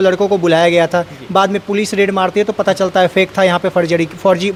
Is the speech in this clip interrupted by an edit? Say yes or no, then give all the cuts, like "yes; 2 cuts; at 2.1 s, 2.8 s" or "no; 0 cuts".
no; 0 cuts